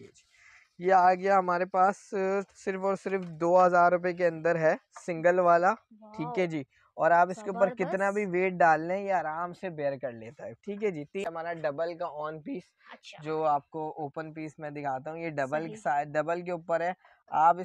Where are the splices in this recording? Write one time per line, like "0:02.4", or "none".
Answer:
0:11.2